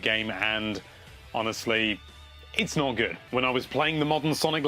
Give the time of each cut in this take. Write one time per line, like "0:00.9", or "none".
0:03.2